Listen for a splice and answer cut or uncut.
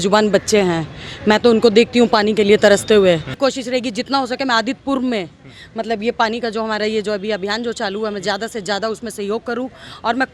cut